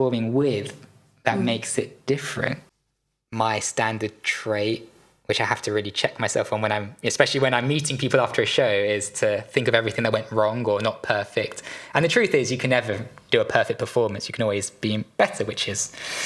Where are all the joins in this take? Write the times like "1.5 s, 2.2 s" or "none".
2.7 s